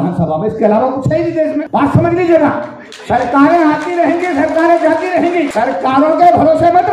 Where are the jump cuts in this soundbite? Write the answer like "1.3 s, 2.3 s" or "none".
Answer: 1.7 s, 5.5 s